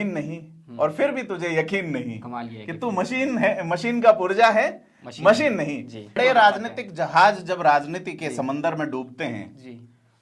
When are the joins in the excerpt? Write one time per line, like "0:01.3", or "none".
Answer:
0:06.2

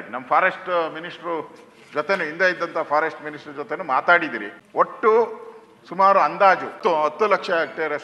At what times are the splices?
0:04.5
0:06.8

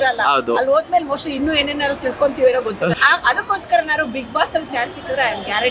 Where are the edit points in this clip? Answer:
none

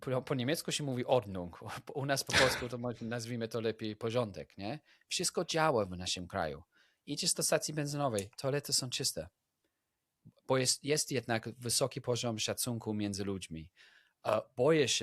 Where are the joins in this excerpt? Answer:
none

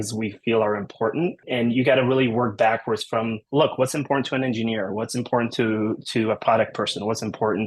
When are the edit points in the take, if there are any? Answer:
0:01.4
0:03.4

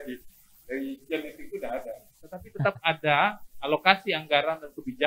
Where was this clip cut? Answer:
0:02.5

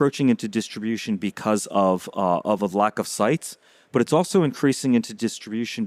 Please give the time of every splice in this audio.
none

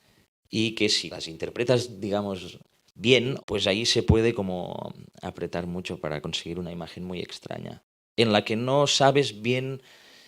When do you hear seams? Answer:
0:03.4

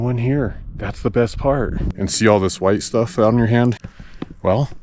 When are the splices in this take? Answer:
0:01.9
0:03.8

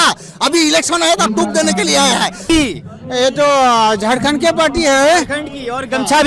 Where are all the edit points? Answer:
0:02.4

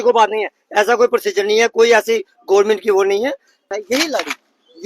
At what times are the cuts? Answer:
0:03.7

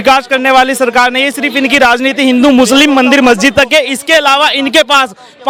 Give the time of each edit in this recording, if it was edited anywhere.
none

